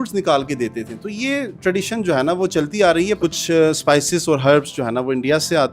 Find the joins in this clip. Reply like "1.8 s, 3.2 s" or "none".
3.2 s